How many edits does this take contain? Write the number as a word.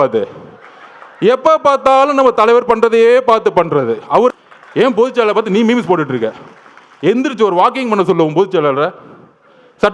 one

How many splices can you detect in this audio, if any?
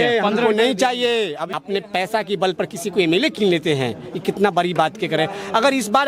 one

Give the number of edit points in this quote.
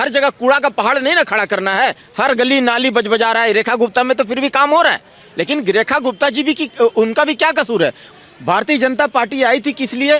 one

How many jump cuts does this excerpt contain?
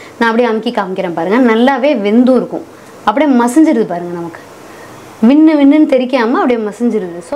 zero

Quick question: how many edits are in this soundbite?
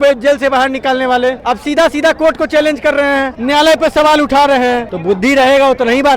three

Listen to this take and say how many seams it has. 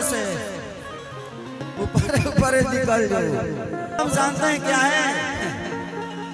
one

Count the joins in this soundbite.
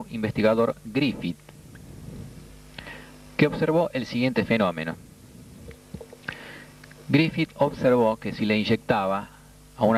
zero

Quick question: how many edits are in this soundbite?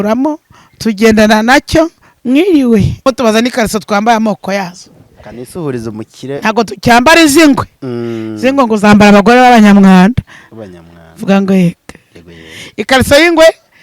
one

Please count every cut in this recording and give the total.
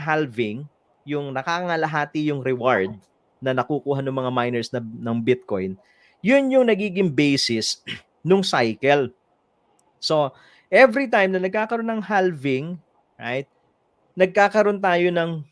zero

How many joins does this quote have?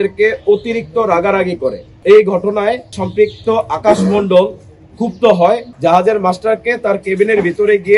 three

